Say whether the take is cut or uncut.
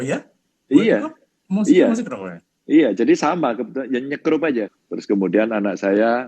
cut